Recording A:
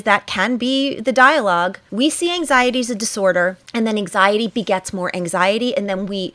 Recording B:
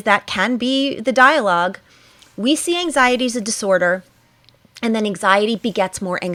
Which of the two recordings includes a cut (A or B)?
A